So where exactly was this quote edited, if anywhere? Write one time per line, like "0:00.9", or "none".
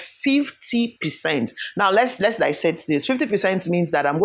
none